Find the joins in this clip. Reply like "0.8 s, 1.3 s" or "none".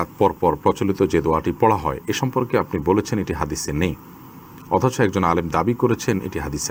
none